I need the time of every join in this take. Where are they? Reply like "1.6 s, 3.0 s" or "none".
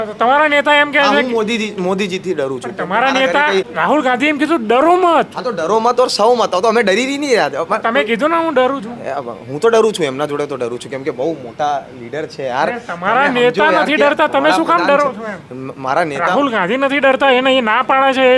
3.7 s